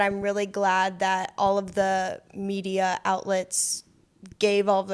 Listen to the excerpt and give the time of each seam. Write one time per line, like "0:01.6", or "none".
none